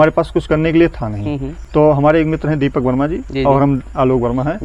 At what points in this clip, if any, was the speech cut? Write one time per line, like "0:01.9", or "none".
none

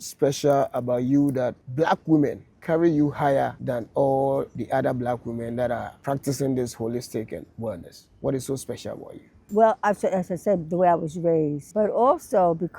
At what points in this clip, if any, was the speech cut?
0:01.6
0:02.5
0:03.6
0:04.6
0:05.9
0:09.4
0:11.6

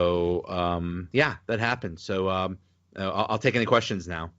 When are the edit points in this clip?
0:01.0

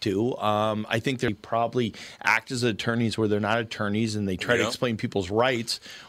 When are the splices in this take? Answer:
0:01.3

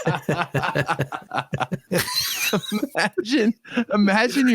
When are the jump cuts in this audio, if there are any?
0:01.8

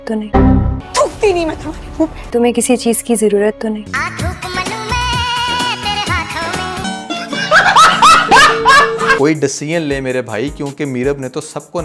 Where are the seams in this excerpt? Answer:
0:09.2

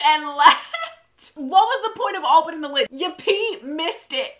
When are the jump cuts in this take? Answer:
0:02.9

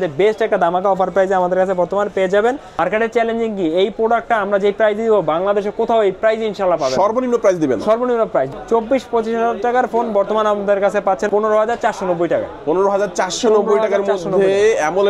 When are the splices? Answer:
0:02.8
0:08.5
0:11.3

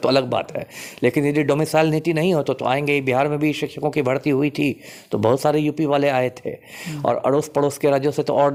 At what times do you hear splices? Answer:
none

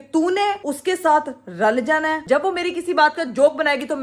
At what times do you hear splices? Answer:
0:02.2

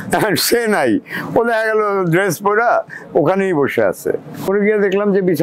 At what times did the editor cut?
0:04.5

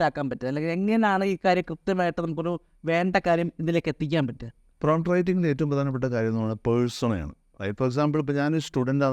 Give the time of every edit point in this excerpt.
none

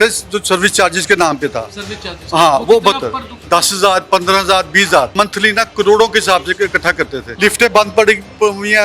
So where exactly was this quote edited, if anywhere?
0:03.4
0:05.1
0:07.2

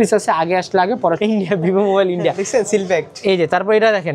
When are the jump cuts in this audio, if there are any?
0:01.2

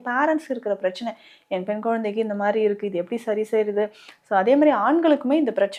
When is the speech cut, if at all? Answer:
none

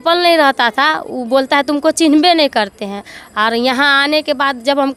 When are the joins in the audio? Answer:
none

